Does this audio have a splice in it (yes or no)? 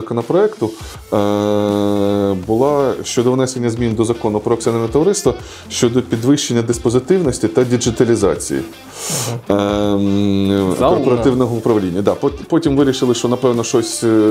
no